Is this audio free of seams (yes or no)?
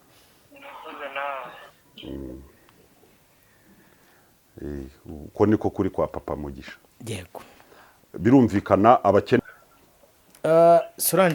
no